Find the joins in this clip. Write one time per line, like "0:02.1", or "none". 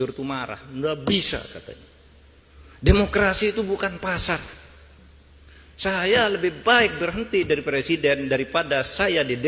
none